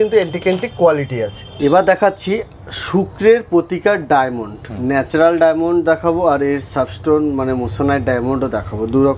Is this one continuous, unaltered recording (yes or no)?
yes